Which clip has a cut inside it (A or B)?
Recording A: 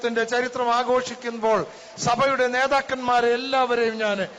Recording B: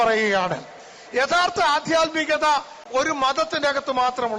B